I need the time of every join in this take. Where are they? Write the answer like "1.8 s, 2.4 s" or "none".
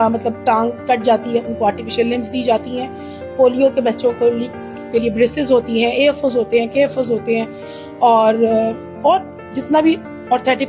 none